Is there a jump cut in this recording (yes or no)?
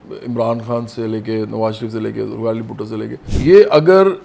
yes